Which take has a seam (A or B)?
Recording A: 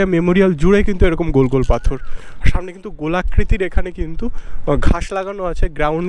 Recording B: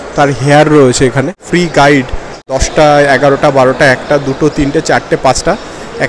B